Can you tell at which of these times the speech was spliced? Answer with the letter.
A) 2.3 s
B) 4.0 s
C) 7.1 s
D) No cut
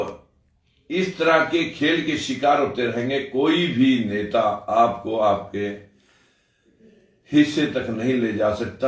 D